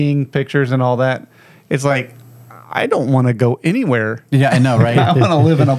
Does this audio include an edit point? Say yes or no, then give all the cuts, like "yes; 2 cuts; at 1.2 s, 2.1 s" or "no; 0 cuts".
no; 0 cuts